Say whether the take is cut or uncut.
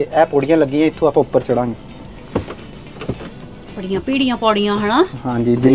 uncut